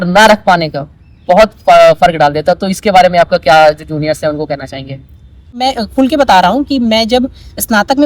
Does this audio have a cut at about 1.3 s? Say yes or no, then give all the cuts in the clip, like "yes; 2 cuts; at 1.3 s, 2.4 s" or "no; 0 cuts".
no; 1 cut; at 5.6 s